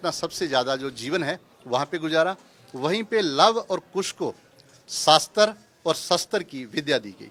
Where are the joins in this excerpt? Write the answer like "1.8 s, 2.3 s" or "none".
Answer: none